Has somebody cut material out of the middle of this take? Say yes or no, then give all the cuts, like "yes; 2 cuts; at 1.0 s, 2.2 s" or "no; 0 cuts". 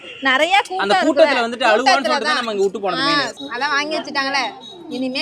yes; 1 cut; at 3.3 s